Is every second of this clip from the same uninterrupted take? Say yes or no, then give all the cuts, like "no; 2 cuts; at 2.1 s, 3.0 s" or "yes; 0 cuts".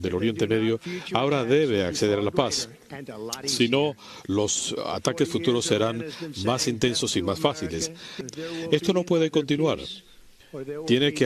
yes; 0 cuts